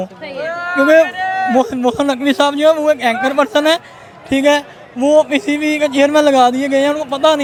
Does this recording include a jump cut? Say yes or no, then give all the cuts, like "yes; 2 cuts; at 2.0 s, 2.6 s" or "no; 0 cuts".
no; 0 cuts